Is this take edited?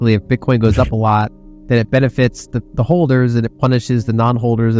no; 0 cuts

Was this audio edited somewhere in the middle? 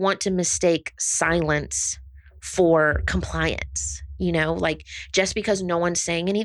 no; 0 cuts

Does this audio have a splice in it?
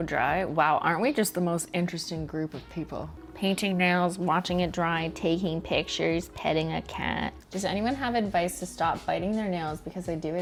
no; 0 cuts

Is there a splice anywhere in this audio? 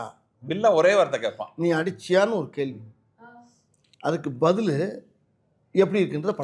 no; 0 cuts

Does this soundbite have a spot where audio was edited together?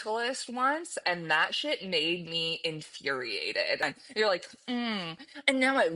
yes; 1 cut; at 3.9 s

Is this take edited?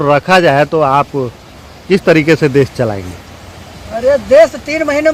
no; 0 cuts

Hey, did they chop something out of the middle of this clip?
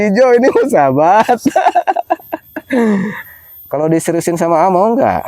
yes; 1 cut; at 3.2 s

